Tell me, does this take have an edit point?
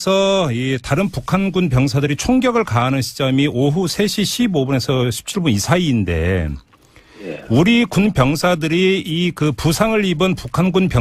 yes; 1 cut; at 9.4 s

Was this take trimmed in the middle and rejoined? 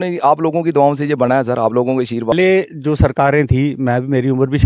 yes; 1 cut; at 2.3 s

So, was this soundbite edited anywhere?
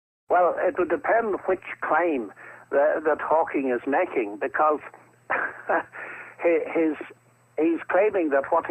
no; 0 cuts

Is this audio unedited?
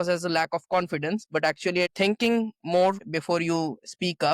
no; 2 cuts; at 1.9 s, 3.1 s

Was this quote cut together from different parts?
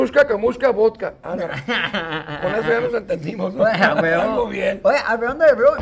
no; 0 cuts

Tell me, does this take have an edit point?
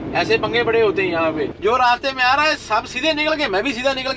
yes; 1 cut; at 1.5 s

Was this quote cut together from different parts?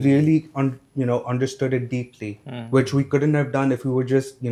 no; 0 cuts

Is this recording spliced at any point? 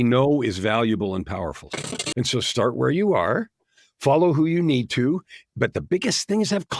yes; 1 cut; at 1.8 s

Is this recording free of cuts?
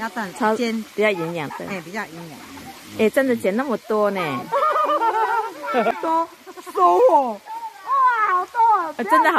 no; 1 cut; at 5.9 s

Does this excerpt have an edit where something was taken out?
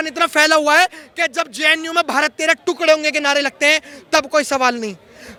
no; 0 cuts

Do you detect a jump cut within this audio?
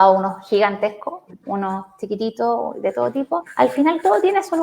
yes; 1 cut; at 3.5 s

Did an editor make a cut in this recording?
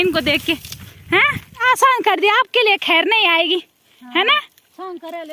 yes; 1 cut; at 1.6 s

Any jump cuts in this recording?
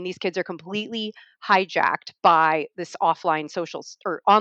no; 0 cuts

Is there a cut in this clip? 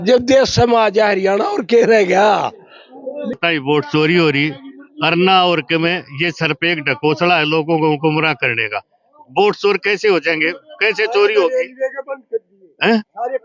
yes; 1 cut; at 3.4 s

